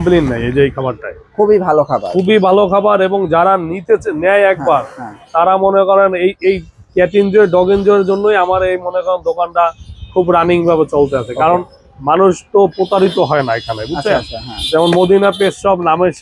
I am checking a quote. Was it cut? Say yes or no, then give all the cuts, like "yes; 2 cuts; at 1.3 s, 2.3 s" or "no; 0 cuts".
no; 0 cuts